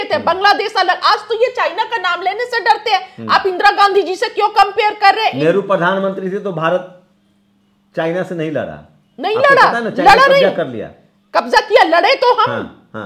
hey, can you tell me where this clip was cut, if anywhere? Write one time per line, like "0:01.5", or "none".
none